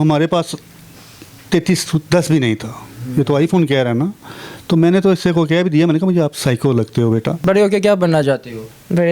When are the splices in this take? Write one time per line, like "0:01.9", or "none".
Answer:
0:07.4